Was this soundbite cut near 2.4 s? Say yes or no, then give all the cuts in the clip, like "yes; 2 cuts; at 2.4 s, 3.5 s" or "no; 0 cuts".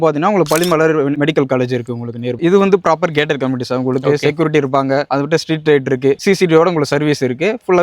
yes; 1 cut; at 2.4 s